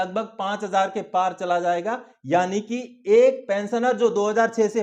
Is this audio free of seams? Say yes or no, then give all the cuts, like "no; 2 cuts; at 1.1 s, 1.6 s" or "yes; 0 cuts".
yes; 0 cuts